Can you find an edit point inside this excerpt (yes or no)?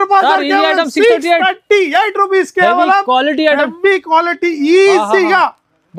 no